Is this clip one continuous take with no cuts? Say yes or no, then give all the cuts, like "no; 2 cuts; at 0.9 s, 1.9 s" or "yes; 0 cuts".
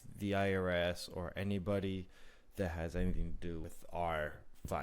no; 1 cut; at 3.6 s